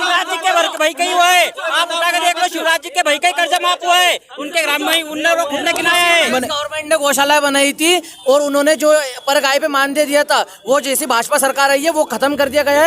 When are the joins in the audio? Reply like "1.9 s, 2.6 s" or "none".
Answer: 6.3 s